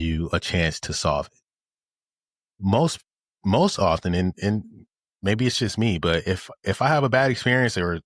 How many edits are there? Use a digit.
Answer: 0